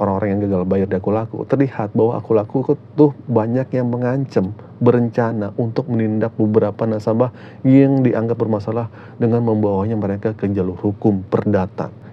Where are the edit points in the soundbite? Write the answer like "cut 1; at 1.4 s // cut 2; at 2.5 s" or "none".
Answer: none